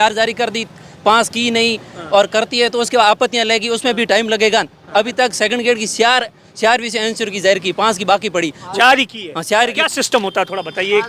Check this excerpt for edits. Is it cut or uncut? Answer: uncut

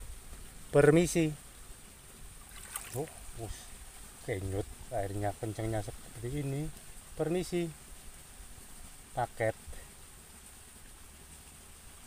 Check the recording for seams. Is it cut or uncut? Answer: uncut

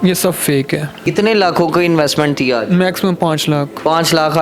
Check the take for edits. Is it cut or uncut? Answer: cut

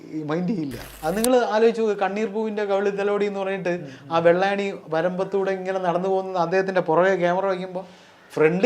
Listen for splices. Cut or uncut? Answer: cut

